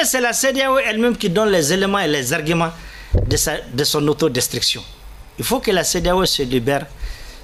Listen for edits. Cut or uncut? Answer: uncut